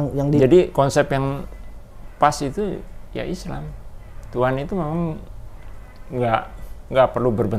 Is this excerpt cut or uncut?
uncut